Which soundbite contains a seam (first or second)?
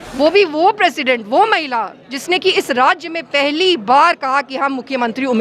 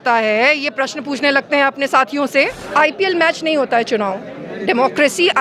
second